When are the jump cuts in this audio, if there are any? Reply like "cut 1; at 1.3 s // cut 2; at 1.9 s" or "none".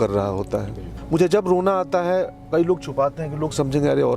cut 1; at 0.9 s